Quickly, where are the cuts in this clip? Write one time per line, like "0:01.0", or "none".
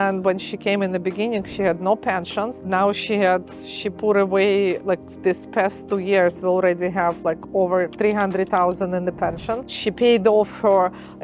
0:09.7